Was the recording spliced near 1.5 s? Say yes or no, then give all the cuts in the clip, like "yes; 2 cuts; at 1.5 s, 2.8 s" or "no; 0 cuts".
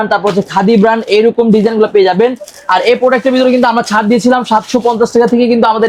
no; 0 cuts